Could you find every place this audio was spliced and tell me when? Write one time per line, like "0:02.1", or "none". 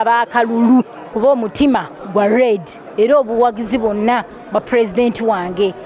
0:01.1